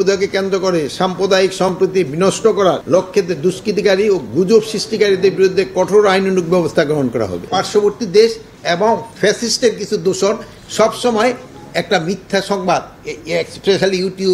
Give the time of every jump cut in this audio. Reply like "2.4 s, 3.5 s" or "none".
2.8 s, 7.5 s